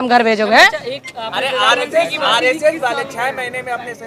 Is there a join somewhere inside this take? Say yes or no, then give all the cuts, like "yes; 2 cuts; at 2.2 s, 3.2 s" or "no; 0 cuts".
no; 0 cuts